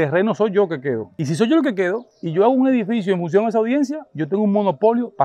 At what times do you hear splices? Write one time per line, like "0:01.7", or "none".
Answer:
none